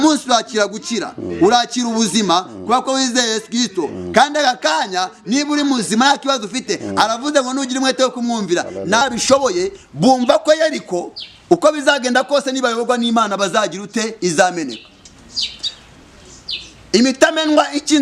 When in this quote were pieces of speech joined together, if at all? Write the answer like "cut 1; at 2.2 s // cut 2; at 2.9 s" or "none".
cut 1; at 9.0 s